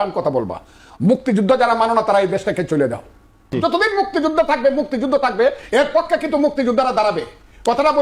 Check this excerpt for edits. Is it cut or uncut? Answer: cut